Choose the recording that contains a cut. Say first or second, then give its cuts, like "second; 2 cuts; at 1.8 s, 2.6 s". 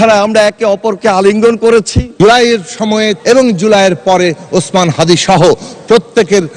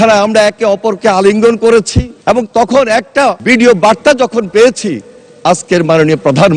first; 2 cuts; at 2.0 s, 3.2 s